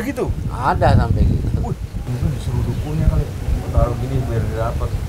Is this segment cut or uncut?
uncut